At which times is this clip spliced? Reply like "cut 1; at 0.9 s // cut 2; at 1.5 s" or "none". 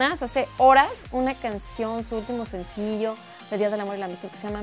none

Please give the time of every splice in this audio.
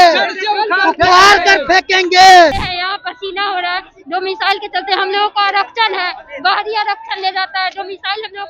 cut 1; at 2.7 s

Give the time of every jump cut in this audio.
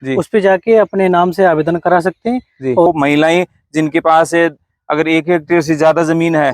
cut 1; at 2.9 s

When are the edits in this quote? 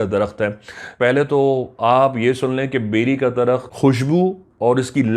cut 1; at 1.0 s // cut 2; at 3.7 s

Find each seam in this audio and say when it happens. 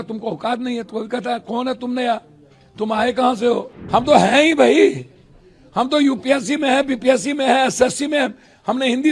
cut 1; at 3.8 s

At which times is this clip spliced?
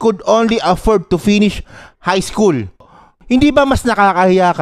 cut 1; at 3.0 s

